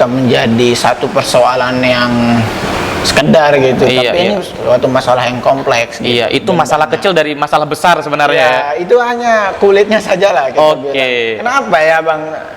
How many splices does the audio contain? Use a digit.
1